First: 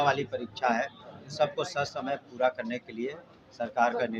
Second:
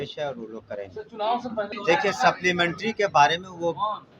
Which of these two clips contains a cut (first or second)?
second